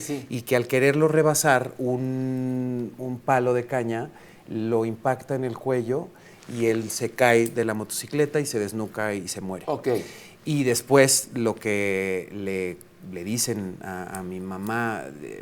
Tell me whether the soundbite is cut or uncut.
uncut